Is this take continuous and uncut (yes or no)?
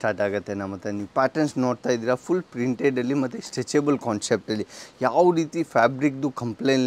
yes